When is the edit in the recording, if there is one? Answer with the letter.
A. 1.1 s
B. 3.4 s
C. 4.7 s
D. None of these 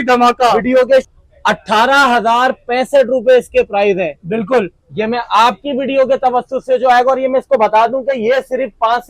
A